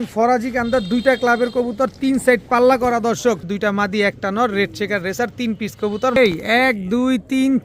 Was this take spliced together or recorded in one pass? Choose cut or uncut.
cut